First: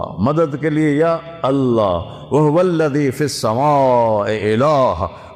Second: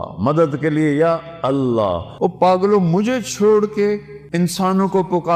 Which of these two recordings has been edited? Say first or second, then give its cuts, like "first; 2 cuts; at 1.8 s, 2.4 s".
second; 2 cuts; at 2.1 s, 4.2 s